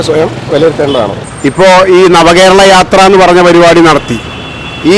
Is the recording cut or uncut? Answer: cut